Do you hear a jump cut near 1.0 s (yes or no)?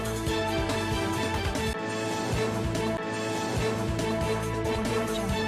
yes